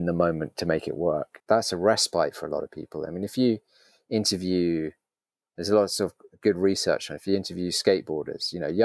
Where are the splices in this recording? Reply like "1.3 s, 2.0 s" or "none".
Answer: 1.3 s